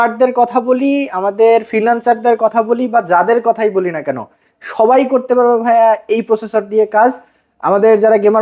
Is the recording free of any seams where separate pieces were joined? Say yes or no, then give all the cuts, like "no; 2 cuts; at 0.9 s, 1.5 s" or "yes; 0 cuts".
yes; 0 cuts